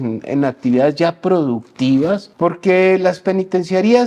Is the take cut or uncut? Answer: cut